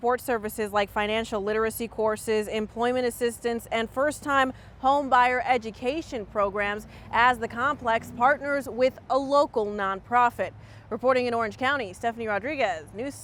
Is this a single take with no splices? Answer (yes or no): yes